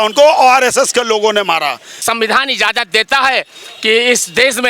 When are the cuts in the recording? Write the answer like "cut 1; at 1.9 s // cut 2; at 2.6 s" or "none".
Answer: cut 1; at 2.0 s